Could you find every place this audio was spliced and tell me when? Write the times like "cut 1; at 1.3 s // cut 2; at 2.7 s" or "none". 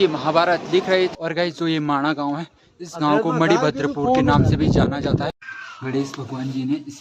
cut 1; at 1.1 s // cut 2; at 5.3 s